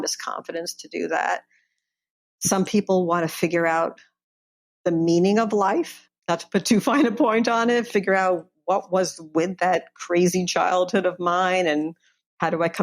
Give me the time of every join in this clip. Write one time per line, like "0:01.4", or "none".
0:06.0